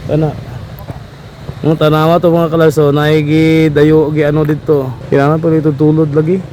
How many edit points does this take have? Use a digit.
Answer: 1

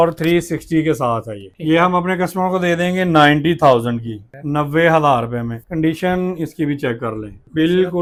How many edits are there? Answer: 0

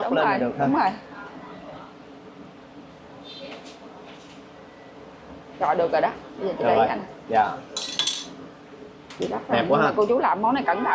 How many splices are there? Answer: 0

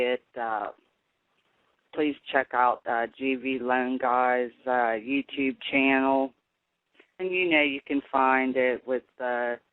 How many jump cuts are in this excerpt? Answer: 1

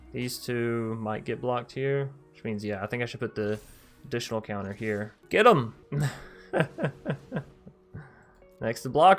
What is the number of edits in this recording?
2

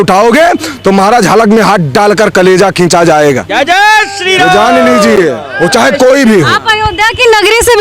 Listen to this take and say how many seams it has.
0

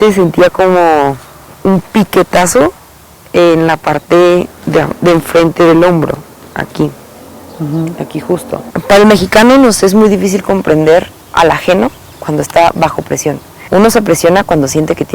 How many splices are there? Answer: 2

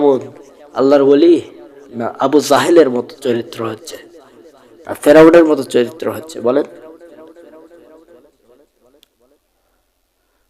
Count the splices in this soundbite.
0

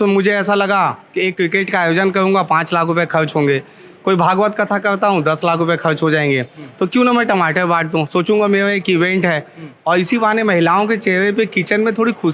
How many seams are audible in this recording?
0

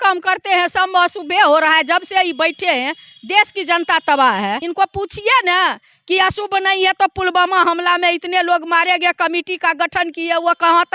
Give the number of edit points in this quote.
1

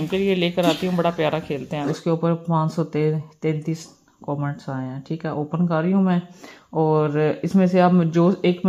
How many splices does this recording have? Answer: 1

